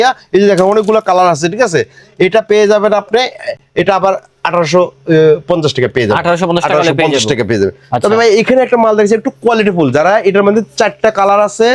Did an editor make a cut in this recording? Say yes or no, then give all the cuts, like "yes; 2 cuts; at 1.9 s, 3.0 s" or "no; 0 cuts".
no; 0 cuts